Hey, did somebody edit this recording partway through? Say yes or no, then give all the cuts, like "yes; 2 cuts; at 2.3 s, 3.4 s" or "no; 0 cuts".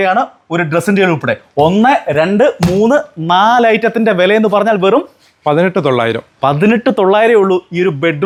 no; 0 cuts